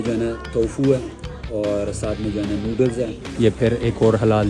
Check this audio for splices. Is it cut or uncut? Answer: cut